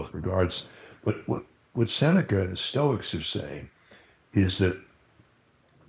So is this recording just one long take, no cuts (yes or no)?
yes